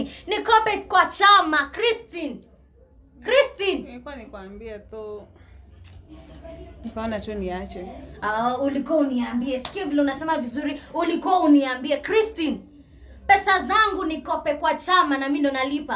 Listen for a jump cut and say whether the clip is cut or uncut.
uncut